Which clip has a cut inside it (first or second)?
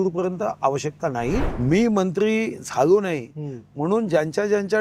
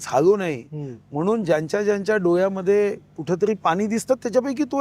first